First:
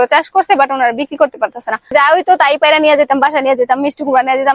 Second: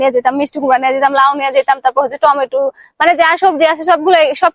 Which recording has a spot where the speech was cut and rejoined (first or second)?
first